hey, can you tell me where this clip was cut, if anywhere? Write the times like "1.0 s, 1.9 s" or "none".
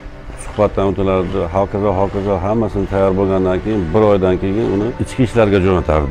5.0 s